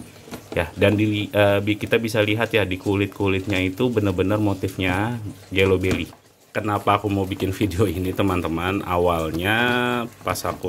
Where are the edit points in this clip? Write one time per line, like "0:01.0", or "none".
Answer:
0:06.2